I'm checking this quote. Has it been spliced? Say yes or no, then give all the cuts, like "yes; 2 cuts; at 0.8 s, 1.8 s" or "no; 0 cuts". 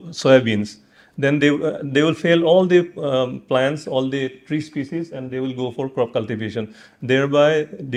no; 0 cuts